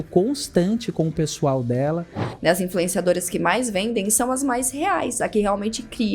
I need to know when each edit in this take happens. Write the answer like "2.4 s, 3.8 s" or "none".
2.3 s